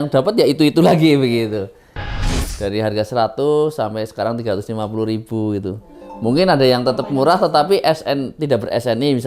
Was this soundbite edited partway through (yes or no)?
yes